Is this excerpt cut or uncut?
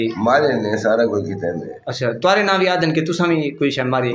uncut